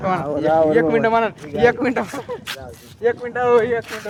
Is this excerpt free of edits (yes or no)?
yes